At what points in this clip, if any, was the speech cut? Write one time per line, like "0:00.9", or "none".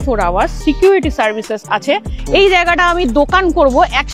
0:02.0

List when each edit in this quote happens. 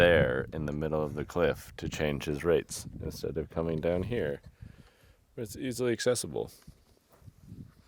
none

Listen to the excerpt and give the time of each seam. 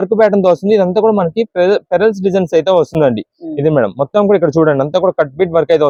none

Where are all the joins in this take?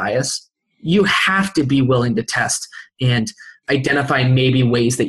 0:03.5

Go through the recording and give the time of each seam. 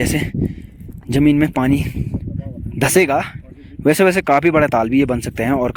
none

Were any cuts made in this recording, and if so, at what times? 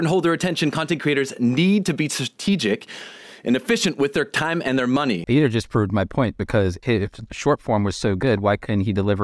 0:05.3
0:06.8

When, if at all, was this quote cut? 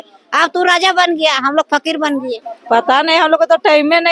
0:02.5

